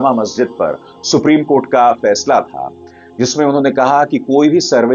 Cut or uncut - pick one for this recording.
uncut